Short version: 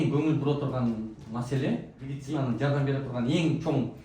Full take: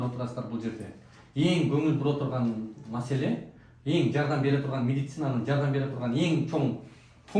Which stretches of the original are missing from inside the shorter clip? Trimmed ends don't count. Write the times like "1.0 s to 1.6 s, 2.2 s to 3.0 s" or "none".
3.8 s to 5.0 s